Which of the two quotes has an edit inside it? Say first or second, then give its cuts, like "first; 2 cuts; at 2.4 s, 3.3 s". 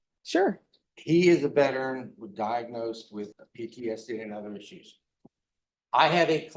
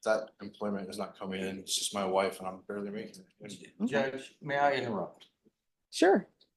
first; 1 cut; at 3.4 s